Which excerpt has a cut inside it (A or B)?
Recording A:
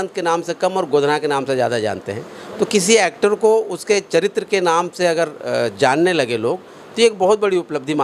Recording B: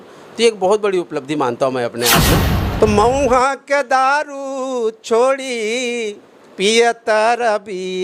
B